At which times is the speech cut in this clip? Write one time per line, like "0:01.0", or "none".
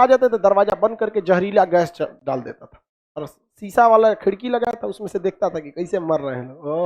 none